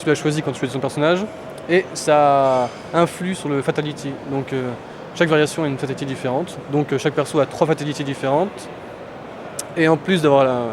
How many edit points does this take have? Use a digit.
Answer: 0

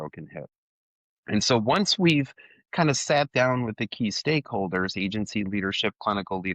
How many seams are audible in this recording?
0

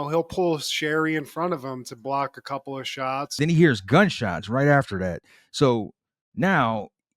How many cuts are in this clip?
1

